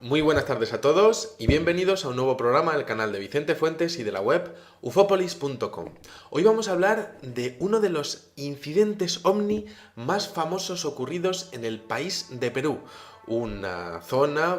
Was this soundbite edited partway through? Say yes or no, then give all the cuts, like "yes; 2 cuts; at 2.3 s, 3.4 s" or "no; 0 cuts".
no; 0 cuts